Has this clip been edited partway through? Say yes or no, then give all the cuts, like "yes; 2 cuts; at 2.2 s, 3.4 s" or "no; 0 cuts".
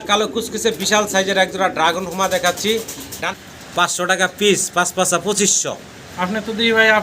yes; 1 cut; at 3.2 s